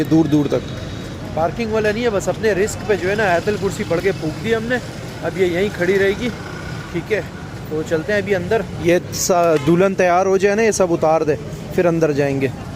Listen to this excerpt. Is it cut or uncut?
uncut